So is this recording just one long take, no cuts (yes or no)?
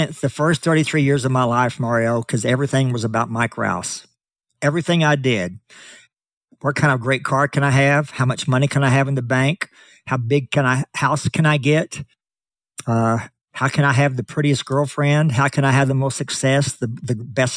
yes